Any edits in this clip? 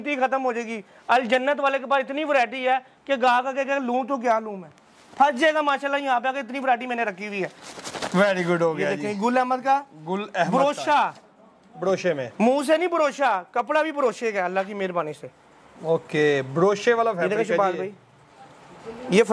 no; 0 cuts

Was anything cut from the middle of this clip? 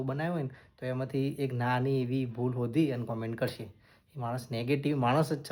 no; 0 cuts

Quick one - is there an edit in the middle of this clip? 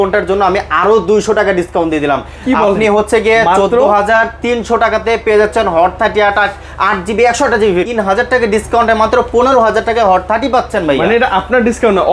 yes; 1 cut; at 7.9 s

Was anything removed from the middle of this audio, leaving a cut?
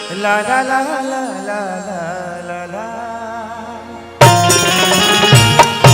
no; 0 cuts

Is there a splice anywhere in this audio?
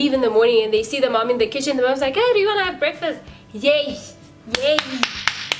no; 0 cuts

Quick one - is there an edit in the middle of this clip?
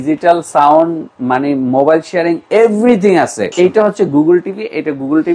yes; 1 cut; at 3.5 s

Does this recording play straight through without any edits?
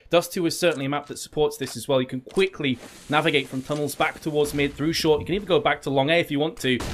yes; 0 cuts

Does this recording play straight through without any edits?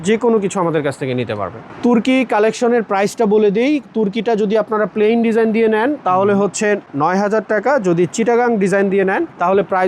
yes; 0 cuts

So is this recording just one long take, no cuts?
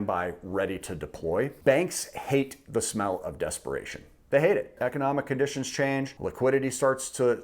no; 3 cuts; at 1.6 s, 4.7 s, 6.2 s

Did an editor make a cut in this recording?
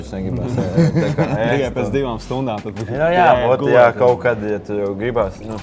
no; 0 cuts

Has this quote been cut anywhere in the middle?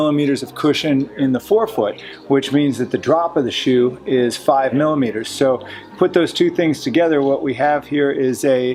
no; 0 cuts

